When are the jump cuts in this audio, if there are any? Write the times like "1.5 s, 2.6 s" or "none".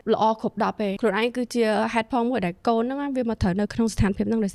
1.0 s